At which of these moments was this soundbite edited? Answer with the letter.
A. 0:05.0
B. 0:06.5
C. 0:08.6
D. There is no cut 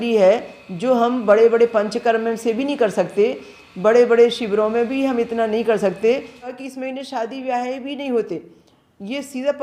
B